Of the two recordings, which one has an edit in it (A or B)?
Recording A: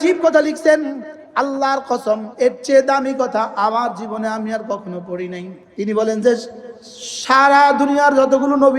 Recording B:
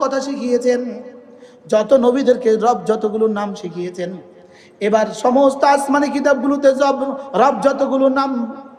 A